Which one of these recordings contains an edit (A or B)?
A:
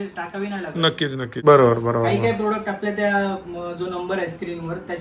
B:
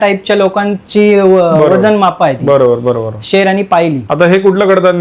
A